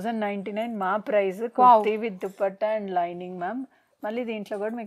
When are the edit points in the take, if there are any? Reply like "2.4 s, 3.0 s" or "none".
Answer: none